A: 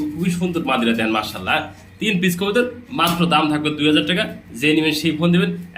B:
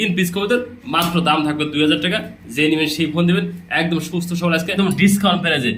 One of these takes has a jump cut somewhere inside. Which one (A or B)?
B